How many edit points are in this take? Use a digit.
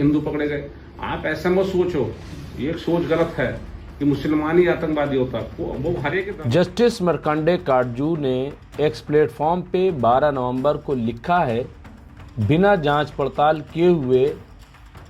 1